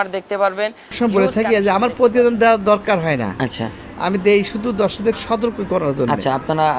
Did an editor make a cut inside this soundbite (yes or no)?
yes